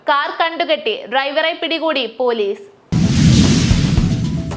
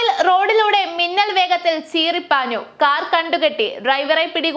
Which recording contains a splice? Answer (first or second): first